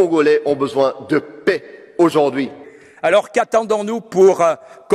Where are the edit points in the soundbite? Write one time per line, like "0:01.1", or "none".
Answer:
0:02.6